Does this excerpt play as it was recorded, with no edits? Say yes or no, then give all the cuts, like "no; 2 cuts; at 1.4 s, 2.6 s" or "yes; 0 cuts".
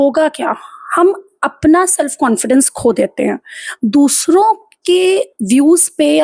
yes; 0 cuts